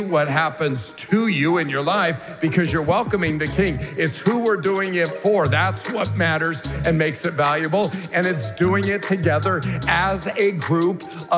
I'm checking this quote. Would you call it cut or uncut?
uncut